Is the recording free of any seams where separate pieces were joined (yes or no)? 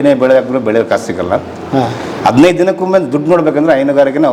yes